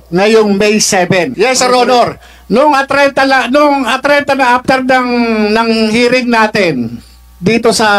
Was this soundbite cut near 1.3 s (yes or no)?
yes